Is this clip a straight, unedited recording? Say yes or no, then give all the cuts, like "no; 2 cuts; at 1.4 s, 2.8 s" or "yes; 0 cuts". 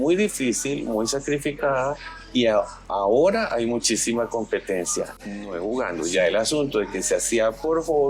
yes; 0 cuts